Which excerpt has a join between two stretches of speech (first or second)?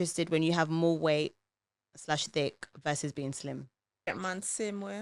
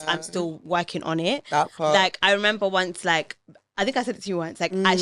first